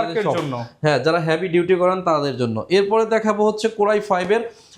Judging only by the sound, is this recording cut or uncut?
uncut